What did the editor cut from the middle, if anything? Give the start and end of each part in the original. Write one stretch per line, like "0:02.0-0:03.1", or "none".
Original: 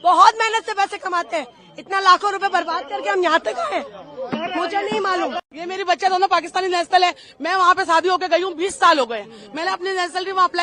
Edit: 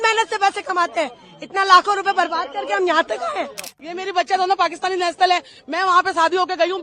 0:04.1-0:05.5